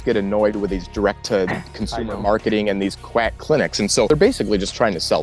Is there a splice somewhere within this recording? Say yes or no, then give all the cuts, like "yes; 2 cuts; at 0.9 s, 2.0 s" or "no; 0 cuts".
yes; 1 cut; at 4.1 s